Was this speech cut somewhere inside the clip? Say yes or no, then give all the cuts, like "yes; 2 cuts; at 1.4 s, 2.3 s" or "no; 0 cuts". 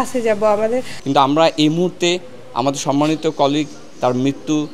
yes; 1 cut; at 0.9 s